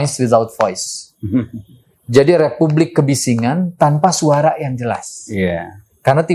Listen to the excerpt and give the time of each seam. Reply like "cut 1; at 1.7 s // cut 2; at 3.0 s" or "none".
none